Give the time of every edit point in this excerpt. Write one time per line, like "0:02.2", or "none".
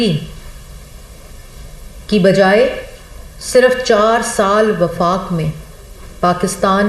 none